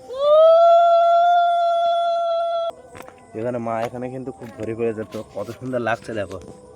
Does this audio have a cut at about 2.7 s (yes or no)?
yes